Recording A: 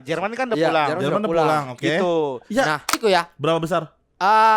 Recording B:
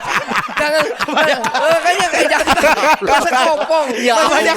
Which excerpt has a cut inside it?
A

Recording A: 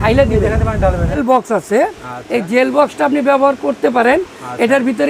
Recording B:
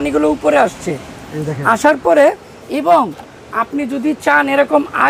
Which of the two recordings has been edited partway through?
A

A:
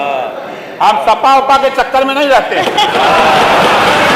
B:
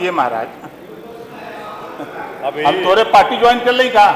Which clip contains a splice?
B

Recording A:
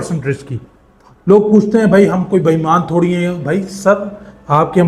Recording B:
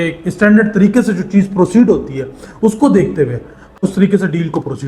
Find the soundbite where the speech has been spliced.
B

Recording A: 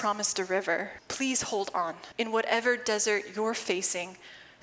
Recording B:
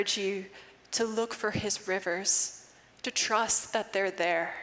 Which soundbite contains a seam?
A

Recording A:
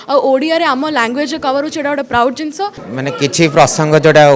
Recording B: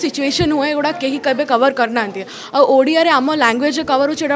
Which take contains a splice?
A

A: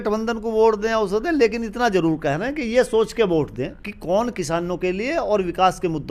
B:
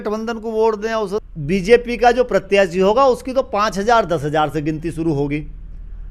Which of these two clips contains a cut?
B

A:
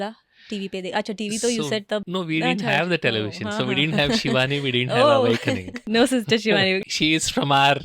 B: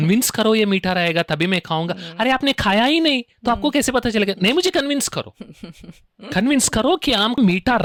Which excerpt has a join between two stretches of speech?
A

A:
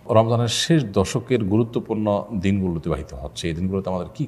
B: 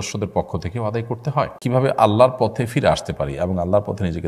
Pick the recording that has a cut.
B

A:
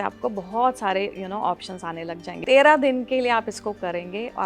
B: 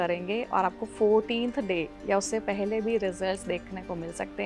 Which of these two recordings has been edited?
A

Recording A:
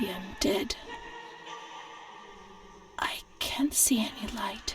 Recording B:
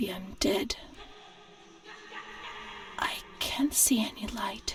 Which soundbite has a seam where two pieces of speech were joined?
A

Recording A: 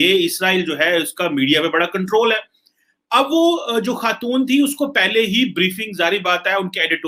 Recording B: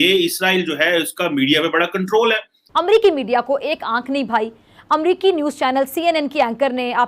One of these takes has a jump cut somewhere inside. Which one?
B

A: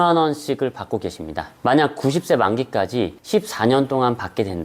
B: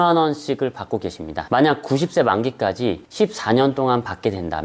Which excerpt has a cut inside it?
B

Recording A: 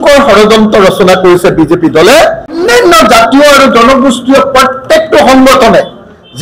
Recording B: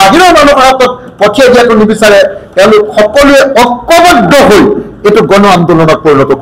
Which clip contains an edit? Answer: A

